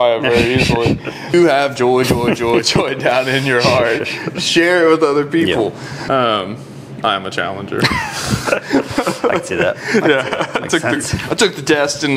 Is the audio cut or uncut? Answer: cut